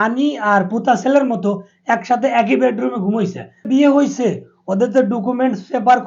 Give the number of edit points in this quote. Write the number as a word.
one